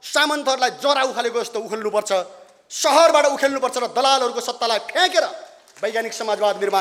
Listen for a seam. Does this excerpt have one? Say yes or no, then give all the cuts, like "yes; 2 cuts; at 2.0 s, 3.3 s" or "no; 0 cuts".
no; 0 cuts